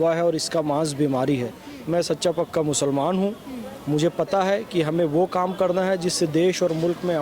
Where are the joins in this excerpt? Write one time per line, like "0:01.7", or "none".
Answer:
0:01.7